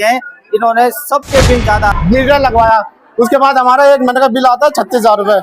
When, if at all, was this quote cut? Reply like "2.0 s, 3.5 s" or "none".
2.0 s